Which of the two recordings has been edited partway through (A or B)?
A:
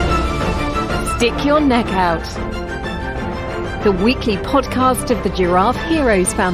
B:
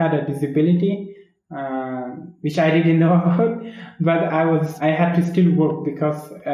B